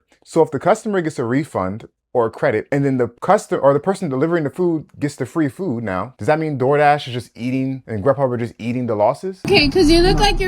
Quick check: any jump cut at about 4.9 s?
no; 4 cuts; at 3.1 s, 6.1 s, 7.9 s, 9.5 s

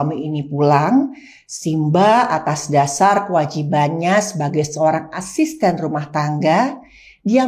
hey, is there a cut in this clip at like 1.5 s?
no; 0 cuts

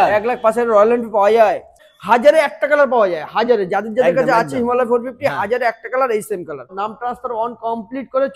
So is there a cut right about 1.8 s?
yes; 2 cuts; at 1.8 s, 6.8 s

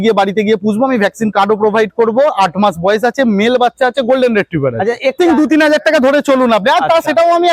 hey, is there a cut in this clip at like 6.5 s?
no; 1 cut; at 5.2 s

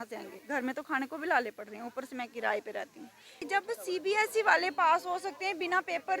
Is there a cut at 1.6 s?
no; 1 cut; at 3.4 s

